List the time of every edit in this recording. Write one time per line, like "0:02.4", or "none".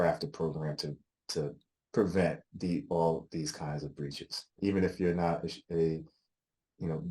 0:04.5